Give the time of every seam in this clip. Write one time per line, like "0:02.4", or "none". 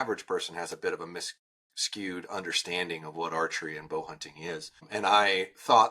0:04.8